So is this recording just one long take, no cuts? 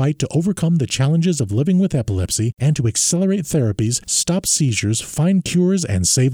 yes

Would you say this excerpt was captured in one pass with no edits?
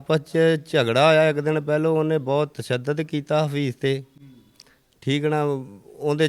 yes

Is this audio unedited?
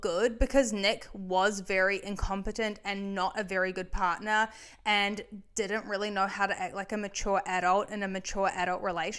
yes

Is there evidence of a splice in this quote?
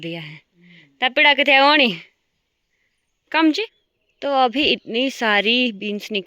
yes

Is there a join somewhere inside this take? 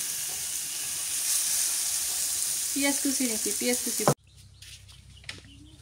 yes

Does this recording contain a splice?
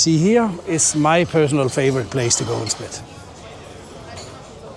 no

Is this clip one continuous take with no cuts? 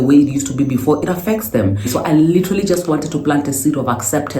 no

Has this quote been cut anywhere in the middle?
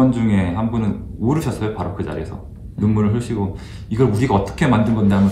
no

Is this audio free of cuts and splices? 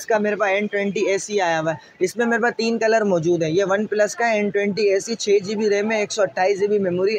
yes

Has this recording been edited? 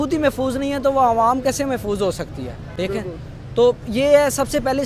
no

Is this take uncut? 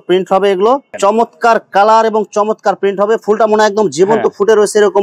no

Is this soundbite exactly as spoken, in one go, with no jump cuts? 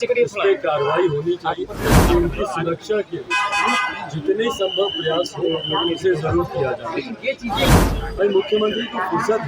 no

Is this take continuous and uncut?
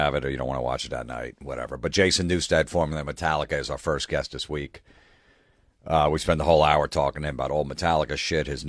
no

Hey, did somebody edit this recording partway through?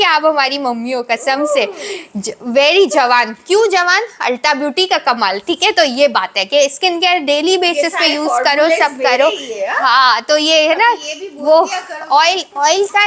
no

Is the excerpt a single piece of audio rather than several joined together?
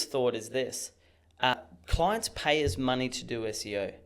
no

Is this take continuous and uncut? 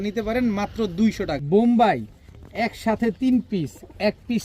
no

